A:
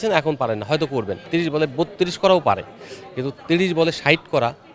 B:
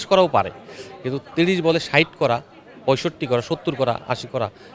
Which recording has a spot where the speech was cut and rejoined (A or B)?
A